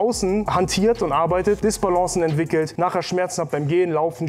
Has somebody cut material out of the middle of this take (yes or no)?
yes